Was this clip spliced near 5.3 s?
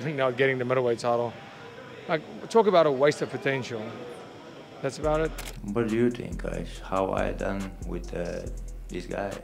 yes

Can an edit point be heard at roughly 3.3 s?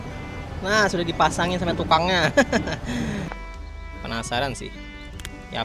yes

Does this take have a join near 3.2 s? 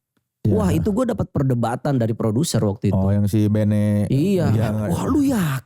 no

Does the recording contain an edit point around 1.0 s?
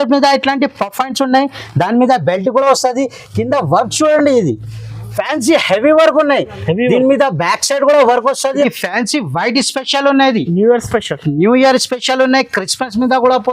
no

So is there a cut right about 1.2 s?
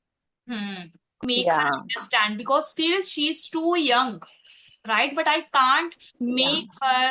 yes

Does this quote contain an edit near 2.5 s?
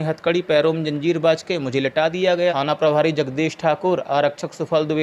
yes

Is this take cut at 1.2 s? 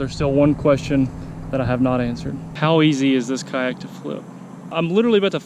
no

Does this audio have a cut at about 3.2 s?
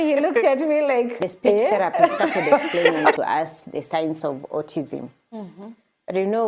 yes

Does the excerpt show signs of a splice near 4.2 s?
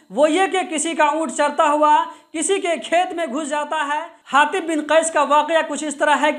yes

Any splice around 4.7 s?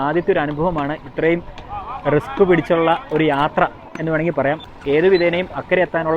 yes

